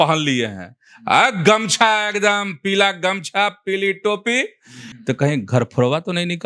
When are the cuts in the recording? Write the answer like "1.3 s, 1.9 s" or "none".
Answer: 4.8 s